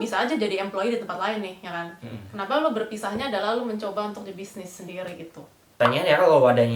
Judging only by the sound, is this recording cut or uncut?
cut